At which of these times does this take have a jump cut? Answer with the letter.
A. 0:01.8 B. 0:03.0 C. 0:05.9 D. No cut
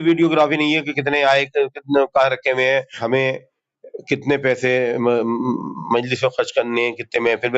B